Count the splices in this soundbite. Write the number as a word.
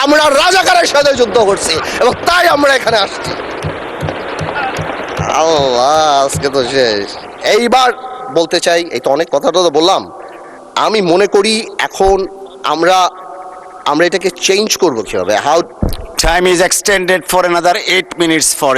zero